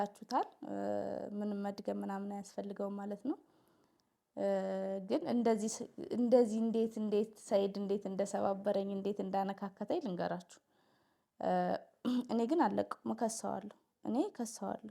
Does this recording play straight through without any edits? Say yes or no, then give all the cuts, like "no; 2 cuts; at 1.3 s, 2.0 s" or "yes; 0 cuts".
yes; 0 cuts